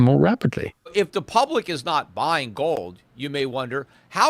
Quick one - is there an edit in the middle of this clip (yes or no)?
yes